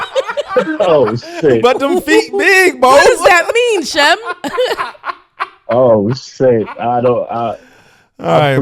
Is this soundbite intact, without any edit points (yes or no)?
yes